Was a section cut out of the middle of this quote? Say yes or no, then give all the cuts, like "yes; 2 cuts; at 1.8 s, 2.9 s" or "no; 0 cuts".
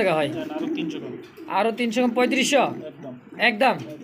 no; 0 cuts